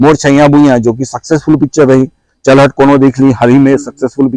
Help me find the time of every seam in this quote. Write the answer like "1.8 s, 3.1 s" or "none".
none